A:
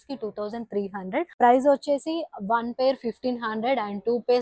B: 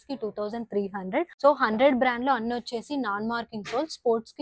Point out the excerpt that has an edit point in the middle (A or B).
A